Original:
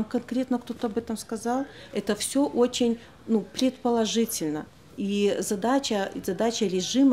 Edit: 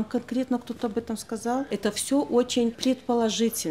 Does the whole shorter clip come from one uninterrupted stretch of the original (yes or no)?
no